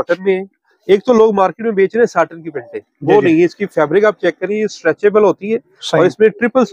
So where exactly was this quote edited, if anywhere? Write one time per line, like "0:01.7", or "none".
none